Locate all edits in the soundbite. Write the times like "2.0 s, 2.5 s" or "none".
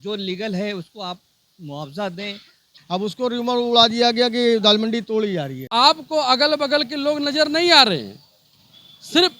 2.8 s, 5.6 s